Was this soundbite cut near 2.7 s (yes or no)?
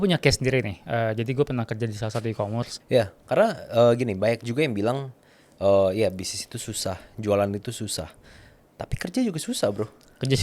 yes